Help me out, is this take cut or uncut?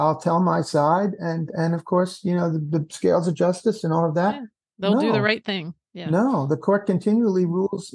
uncut